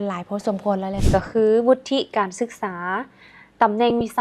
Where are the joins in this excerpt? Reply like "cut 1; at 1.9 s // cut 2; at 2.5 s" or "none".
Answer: cut 1; at 1.0 s